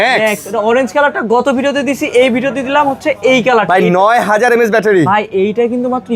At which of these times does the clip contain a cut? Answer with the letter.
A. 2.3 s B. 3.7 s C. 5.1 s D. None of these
D